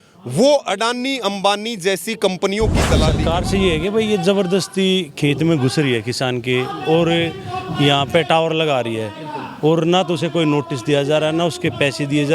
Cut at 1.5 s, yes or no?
no